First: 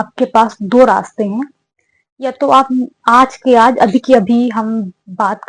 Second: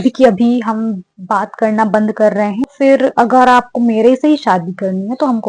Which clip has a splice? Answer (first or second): second